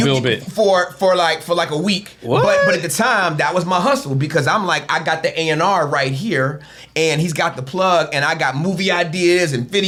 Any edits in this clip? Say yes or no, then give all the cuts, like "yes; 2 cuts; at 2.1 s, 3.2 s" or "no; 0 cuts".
no; 0 cuts